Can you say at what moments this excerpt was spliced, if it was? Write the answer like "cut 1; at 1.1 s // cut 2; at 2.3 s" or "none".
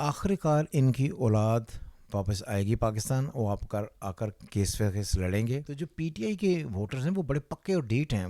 cut 1; at 5.8 s

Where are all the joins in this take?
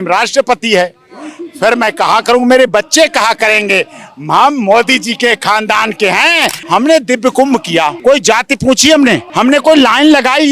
cut 1; at 6.6 s // cut 2; at 8.0 s // cut 3; at 9.3 s

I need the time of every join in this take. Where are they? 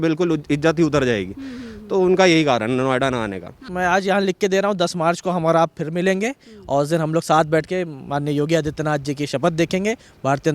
cut 1; at 3.7 s

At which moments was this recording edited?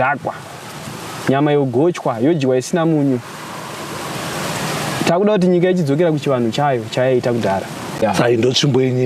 cut 1; at 8.0 s

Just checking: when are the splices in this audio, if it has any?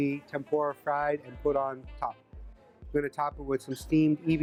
none

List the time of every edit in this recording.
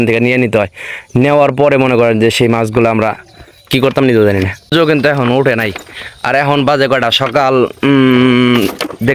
none

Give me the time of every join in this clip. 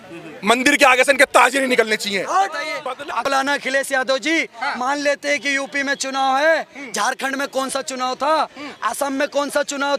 cut 1; at 2.6 s

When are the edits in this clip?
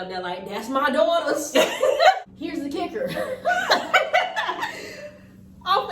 cut 1; at 2.2 s

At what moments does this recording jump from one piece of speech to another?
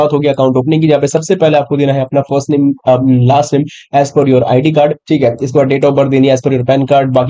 none

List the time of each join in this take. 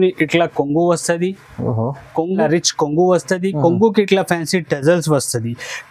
cut 1; at 2.4 s

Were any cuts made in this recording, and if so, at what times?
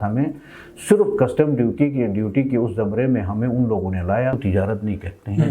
cut 1; at 4.4 s

